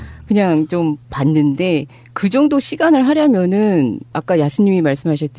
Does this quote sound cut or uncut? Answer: cut